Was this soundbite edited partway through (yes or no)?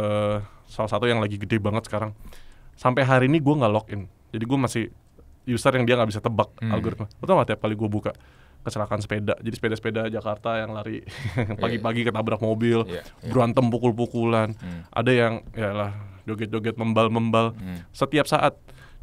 no